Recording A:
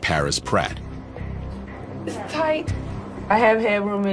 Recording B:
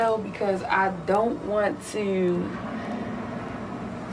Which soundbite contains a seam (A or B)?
A